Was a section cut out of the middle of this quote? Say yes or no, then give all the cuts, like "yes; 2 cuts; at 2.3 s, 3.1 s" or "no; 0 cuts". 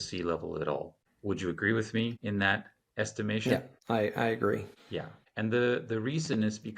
no; 0 cuts